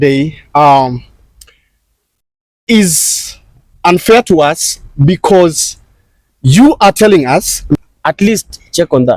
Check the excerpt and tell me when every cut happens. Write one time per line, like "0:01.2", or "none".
0:07.8

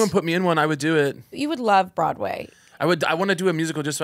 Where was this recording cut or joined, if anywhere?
0:01.3

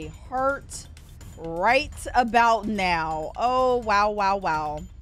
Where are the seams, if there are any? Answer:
none

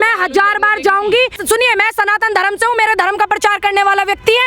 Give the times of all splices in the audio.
0:01.4

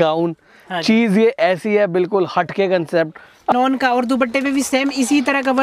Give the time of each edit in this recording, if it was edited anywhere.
0:03.5

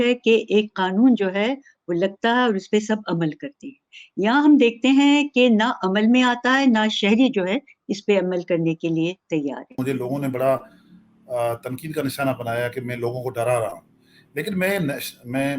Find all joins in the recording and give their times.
0:09.7

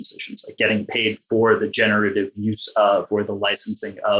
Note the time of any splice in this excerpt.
none

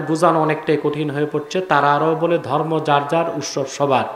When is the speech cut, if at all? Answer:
none

